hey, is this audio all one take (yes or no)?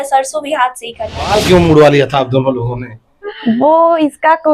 no